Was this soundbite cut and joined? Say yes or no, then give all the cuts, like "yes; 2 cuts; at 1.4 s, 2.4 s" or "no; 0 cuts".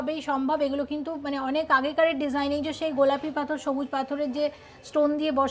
no; 0 cuts